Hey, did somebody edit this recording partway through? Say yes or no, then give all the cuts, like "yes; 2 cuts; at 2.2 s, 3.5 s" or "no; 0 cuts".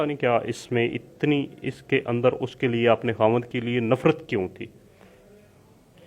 no; 0 cuts